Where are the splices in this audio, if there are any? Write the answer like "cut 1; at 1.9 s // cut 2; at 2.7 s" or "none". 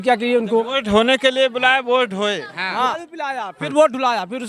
cut 1; at 3.0 s